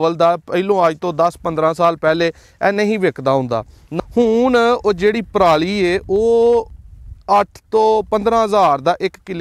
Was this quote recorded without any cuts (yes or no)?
no